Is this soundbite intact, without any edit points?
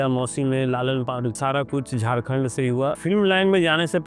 no; 2 cuts; at 1.4 s, 3.0 s

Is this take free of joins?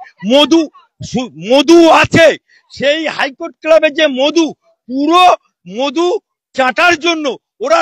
yes; 0 cuts

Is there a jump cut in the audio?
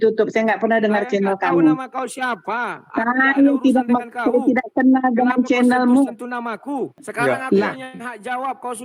yes; 1 cut; at 7.0 s

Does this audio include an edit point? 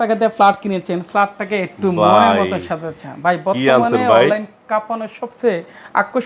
no; 0 cuts

